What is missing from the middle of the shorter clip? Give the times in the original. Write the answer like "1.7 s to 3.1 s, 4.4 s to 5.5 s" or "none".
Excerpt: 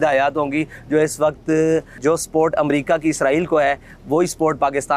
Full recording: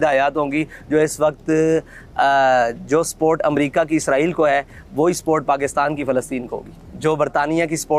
1.9 s to 2.8 s

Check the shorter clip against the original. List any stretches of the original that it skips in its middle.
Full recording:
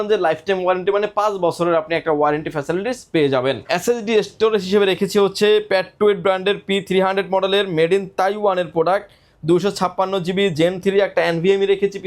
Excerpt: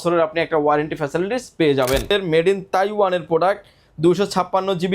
3.6 s to 7.5 s

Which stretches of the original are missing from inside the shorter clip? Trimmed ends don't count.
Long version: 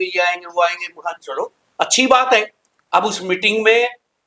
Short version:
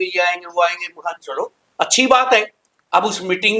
none

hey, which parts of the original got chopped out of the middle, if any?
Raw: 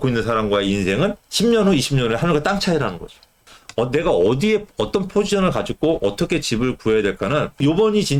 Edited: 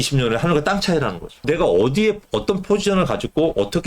3.2 s to 3.9 s

